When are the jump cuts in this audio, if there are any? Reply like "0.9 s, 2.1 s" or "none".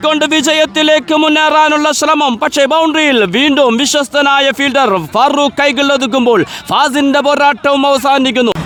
none

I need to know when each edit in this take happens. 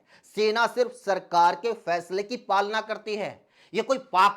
none

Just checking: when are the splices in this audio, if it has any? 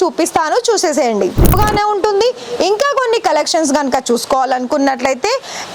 1.5 s

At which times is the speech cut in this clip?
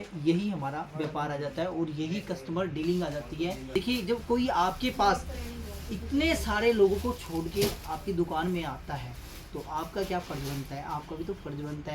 3.6 s

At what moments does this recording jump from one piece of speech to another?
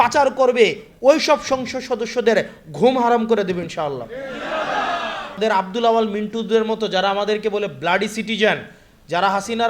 5.4 s

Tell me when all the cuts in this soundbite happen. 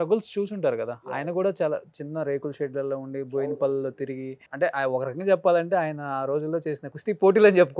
4.4 s, 6.9 s

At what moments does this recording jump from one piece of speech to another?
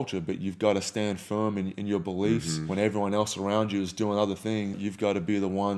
2.6 s, 4.7 s

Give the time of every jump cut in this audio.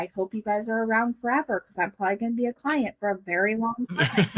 none

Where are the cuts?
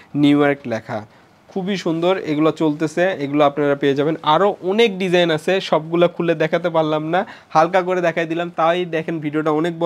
none

